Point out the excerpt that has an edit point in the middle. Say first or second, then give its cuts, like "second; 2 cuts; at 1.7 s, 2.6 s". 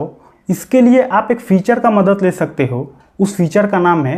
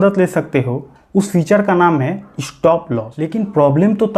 second; 1 cut; at 3.2 s